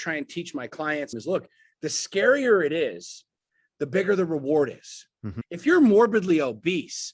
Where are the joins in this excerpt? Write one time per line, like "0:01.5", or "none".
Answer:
0:01.1
0:05.3